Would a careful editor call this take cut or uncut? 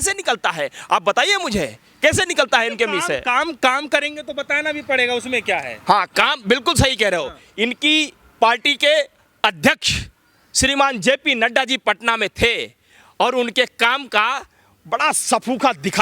uncut